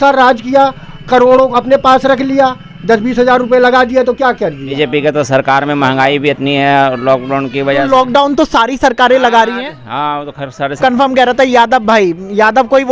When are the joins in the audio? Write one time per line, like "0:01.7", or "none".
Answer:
0:04.6
0:10.7